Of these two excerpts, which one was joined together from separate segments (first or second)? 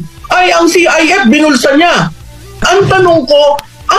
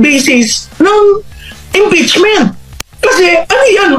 first